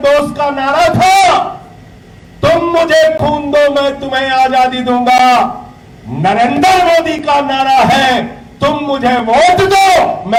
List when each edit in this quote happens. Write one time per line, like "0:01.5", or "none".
none